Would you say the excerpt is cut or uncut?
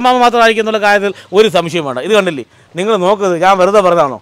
uncut